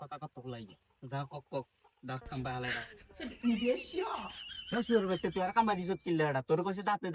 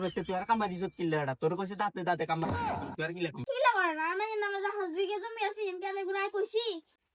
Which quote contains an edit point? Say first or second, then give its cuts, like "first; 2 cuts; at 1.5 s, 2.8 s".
second; 1 cut; at 3.4 s